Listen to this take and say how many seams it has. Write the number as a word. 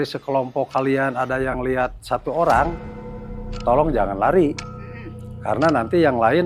zero